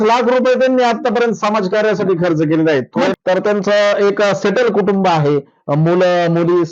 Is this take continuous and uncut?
no; 1 cut; at 3.1 s

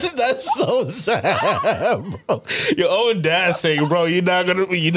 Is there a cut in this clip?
no; 0 cuts

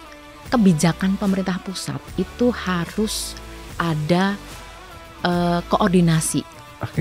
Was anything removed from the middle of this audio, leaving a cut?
no; 0 cuts

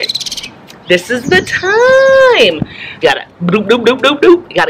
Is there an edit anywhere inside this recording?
yes; 1 cut; at 2.8 s

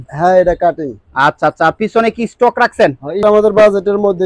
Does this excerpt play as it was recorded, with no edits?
no; 1 cut; at 3.2 s

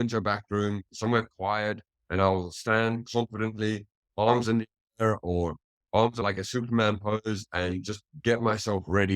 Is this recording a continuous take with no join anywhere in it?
no; 1 cut; at 6.2 s

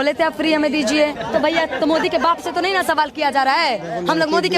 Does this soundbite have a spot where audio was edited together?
yes; 1 cut; at 1.2 s

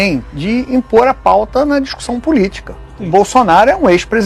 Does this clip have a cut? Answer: no; 0 cuts

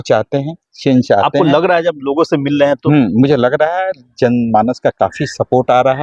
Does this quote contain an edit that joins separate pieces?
no; 0 cuts

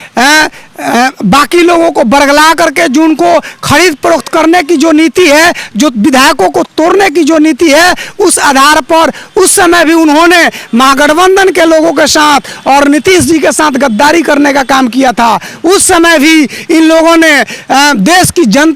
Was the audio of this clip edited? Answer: no; 0 cuts

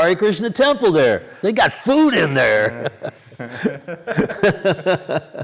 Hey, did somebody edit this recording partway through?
yes; 1 cut; at 1.4 s

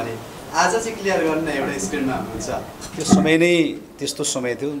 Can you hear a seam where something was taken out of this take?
yes; 1 cut; at 3.2 s

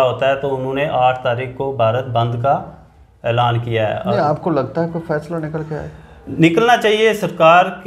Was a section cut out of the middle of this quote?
no; 0 cuts

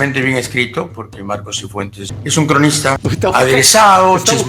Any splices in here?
yes; 2 cuts; at 2.1 s, 3.0 s

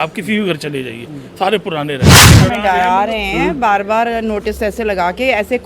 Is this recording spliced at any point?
yes; 1 cut; at 2.2 s

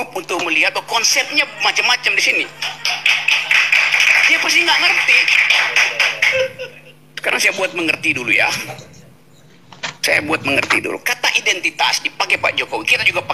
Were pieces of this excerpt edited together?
no; 0 cuts

